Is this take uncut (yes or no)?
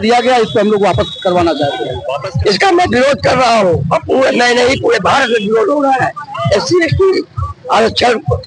no